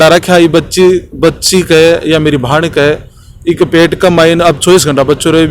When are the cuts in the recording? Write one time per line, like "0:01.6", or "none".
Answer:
none